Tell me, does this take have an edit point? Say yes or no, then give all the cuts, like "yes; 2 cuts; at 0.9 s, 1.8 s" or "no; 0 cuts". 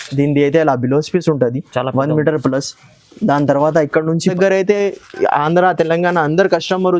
yes; 1 cut; at 4.3 s